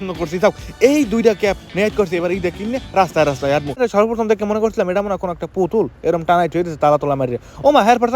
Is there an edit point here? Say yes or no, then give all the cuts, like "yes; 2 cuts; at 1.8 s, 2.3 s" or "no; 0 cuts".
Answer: yes; 1 cut; at 3.8 s